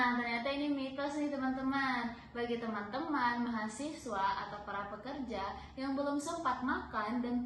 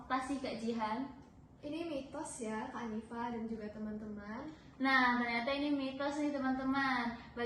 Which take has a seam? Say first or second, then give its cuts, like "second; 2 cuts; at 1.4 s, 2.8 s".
second; 1 cut; at 1.2 s